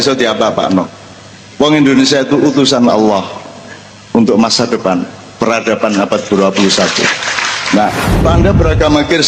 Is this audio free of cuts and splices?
no; 1 cut; at 8.2 s

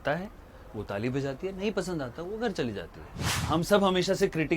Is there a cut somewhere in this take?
yes; 1 cut; at 3.4 s

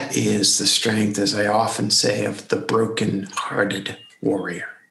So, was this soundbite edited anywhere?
no; 0 cuts

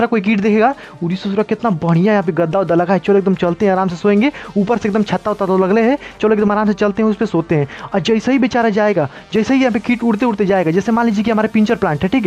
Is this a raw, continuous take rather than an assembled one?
yes; 0 cuts

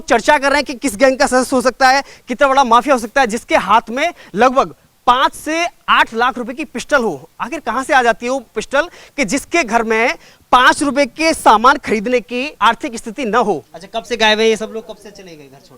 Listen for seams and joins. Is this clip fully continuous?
no; 2 cuts; at 12.5 s, 13.7 s

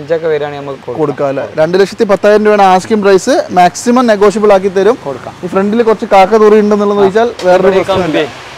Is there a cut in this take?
no; 0 cuts

